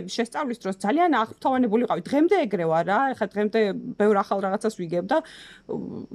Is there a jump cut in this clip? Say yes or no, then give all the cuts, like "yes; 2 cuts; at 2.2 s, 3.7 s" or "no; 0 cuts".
no; 0 cuts